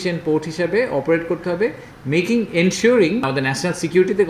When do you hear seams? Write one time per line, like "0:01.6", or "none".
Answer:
0:03.2

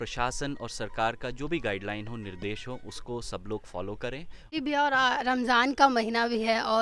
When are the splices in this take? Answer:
0:04.5

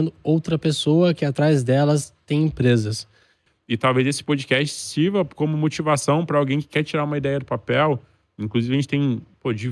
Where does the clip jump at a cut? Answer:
0:03.5

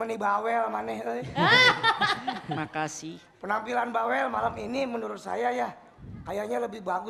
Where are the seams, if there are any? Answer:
none

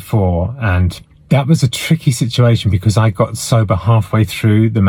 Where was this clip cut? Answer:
none

